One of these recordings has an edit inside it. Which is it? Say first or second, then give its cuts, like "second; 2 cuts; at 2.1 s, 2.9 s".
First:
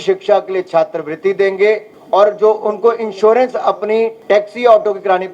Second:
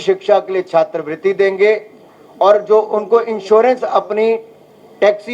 first; 2 cuts; at 1.9 s, 4.2 s